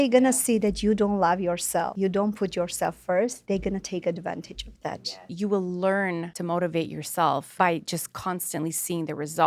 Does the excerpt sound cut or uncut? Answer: cut